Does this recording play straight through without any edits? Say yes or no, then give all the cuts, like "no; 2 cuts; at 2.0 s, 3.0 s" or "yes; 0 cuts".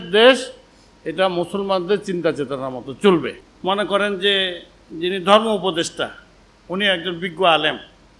no; 1 cut; at 3.4 s